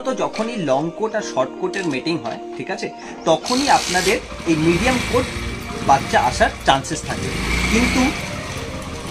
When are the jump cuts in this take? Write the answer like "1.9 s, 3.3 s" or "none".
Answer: none